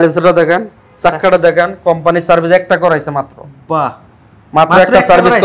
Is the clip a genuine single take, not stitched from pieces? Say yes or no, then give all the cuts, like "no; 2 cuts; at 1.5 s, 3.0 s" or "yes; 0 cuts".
yes; 0 cuts